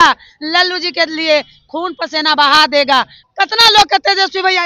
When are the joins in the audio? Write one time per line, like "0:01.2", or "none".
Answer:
0:03.2